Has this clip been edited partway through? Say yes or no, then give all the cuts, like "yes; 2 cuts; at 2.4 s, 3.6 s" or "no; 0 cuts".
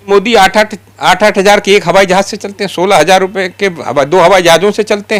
no; 0 cuts